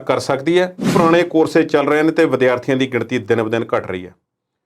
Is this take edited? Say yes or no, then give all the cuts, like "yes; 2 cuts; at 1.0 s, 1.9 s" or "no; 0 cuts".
yes; 1 cut; at 0.9 s